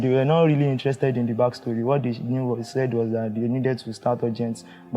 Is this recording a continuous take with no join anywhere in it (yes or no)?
yes